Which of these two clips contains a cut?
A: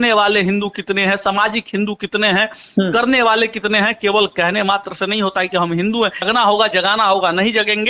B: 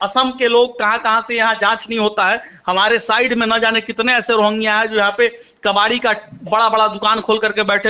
A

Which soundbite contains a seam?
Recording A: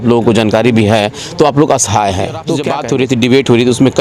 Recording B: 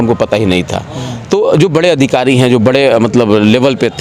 A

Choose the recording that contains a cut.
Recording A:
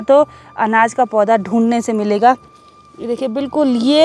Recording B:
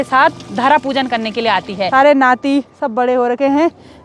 B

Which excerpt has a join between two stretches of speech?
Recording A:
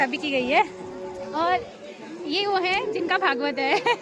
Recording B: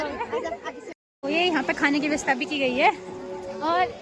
B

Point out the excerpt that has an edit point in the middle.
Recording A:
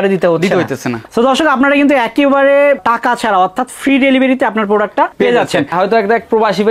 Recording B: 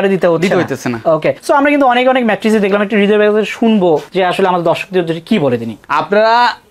A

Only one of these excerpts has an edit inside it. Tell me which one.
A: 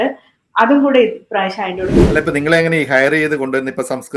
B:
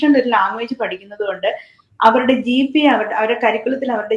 A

